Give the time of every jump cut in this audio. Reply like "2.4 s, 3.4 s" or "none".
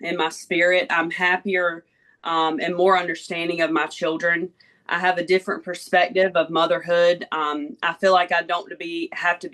none